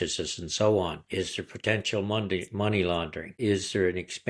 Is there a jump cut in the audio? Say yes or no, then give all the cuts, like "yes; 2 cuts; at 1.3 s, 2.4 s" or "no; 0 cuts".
yes; 2 cuts; at 1.0 s, 3.3 s